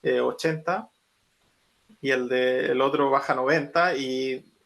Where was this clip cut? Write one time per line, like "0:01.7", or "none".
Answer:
none